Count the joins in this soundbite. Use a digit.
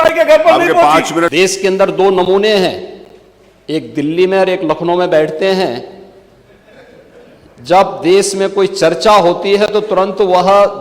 1